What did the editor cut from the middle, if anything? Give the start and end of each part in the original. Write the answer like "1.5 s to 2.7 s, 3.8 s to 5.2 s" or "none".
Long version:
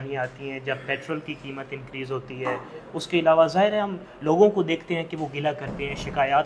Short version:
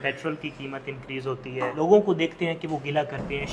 2.5 s to 4.2 s